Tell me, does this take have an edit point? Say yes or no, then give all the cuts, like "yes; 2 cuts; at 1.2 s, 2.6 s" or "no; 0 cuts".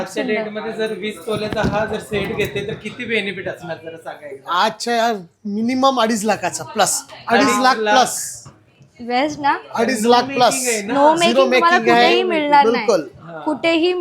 no; 0 cuts